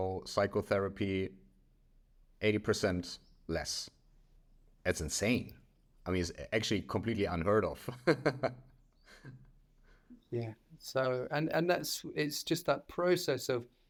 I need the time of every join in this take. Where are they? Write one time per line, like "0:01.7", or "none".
none